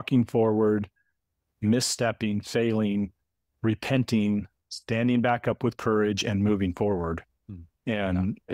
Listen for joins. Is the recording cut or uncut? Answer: uncut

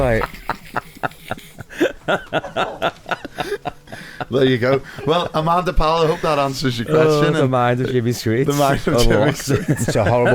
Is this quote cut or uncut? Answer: cut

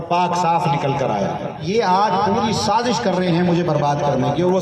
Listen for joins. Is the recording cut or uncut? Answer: cut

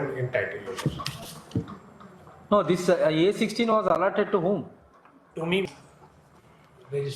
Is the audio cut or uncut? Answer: cut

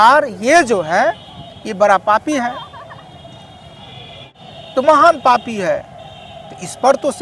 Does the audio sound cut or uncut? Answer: cut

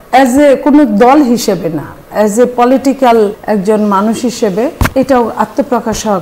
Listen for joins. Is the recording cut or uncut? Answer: cut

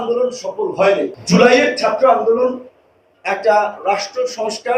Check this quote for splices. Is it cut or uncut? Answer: cut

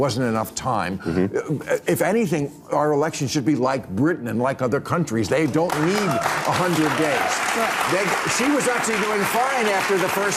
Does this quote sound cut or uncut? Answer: uncut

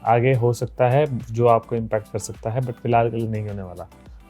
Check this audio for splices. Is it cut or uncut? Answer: uncut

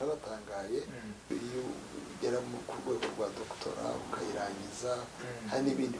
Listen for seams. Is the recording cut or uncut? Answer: cut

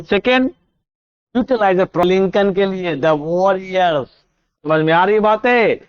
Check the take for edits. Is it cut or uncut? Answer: cut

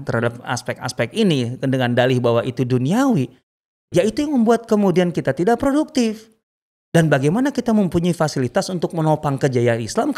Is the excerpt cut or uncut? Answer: uncut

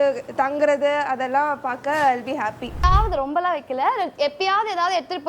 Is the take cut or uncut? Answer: cut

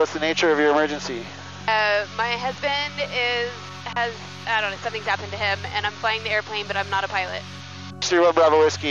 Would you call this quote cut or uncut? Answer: uncut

